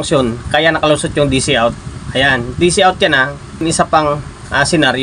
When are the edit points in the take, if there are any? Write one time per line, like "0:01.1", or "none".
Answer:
0:03.6